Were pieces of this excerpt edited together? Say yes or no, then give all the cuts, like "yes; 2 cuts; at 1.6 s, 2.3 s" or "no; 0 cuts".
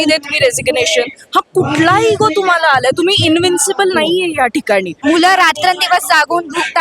yes; 1 cut; at 5.0 s